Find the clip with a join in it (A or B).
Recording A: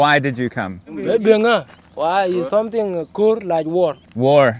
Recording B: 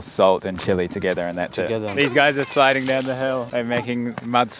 B